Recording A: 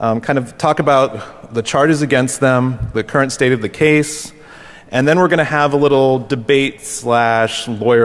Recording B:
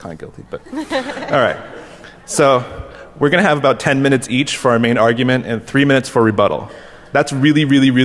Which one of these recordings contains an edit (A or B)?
B